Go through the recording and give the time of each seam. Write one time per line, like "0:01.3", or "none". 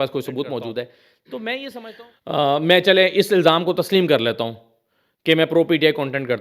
0:01.9